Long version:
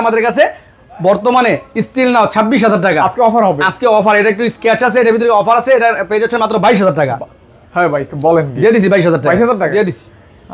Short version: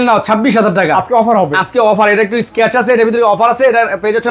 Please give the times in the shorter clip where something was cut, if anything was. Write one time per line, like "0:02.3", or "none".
none